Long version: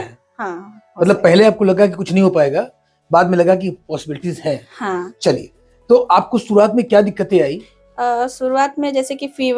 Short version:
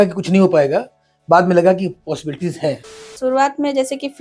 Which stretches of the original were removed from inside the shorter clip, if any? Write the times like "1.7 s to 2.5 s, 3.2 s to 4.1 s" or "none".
4.9 s to 8.3 s

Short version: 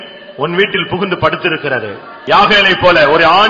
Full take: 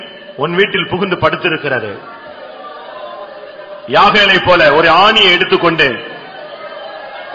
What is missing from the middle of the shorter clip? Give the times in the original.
2.1 s to 3.7 s

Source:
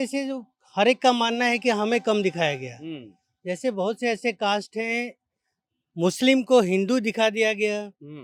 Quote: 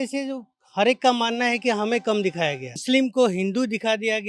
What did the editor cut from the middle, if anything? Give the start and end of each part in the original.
2.8 s to 6.2 s

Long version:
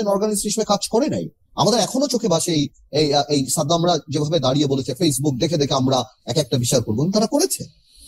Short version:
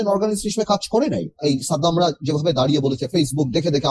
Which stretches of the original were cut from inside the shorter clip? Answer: 1.4 s to 3.3 s

